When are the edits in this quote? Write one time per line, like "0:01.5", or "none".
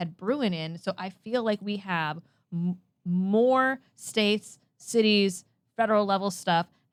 none